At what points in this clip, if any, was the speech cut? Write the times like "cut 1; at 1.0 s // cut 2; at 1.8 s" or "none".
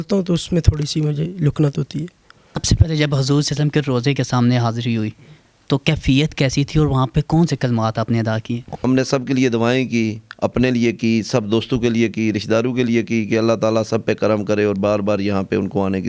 cut 1; at 2.6 s // cut 2; at 8.8 s